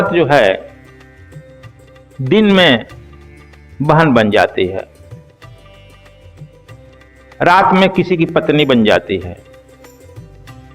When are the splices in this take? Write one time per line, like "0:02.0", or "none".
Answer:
0:00.8
0:02.2
0:04.9
0:07.0